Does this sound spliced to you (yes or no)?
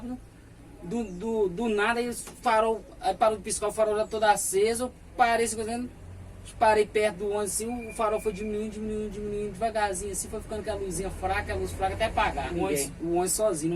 yes